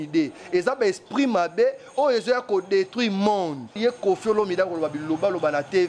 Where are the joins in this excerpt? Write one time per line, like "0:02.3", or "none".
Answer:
0:03.7